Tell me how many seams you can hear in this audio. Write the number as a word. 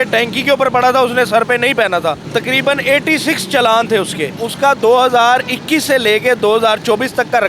two